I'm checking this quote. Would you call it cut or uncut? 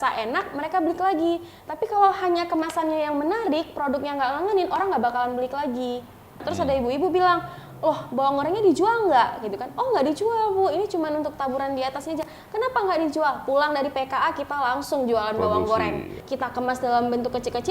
cut